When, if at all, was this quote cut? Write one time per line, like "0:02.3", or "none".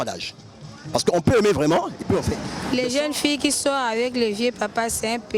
0:02.6